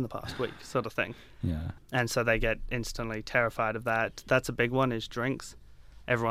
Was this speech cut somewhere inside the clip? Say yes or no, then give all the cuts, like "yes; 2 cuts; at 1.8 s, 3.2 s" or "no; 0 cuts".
no; 0 cuts